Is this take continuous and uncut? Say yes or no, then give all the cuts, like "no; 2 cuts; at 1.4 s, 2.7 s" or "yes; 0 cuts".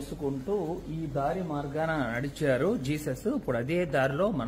yes; 0 cuts